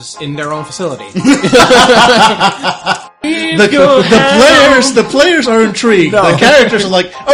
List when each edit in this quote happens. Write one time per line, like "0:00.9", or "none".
0:03.2